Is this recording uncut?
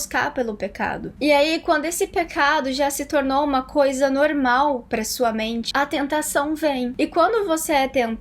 no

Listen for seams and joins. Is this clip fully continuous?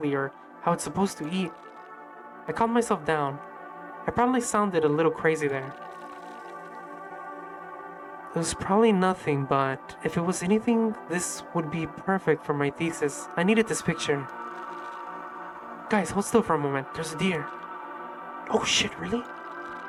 yes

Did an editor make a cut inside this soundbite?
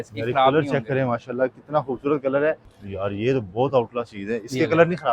yes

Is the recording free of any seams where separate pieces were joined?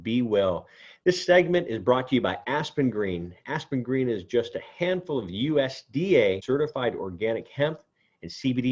no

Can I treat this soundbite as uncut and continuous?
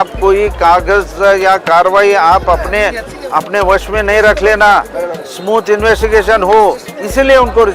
yes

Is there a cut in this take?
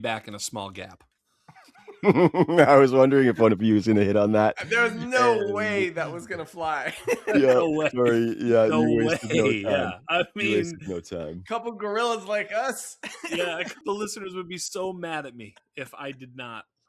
yes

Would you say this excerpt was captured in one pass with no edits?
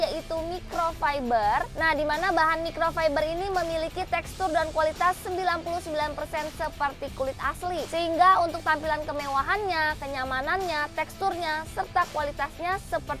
yes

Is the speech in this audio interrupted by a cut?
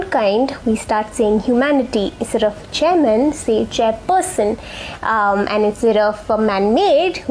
no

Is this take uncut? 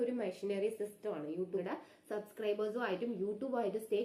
no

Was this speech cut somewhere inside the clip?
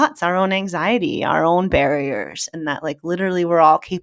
no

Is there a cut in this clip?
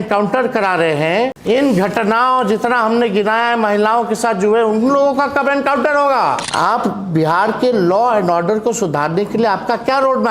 yes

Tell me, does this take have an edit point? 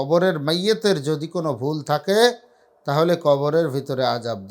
no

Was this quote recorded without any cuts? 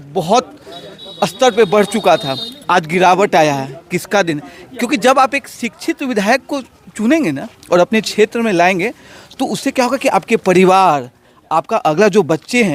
yes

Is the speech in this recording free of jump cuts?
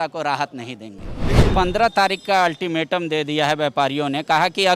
no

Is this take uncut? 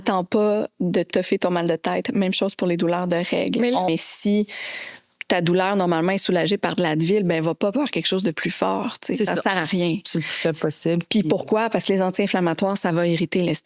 no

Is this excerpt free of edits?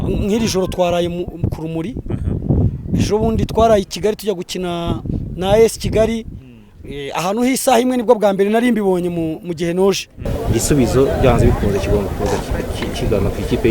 no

